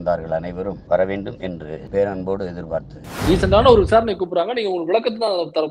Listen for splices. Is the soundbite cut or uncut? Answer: cut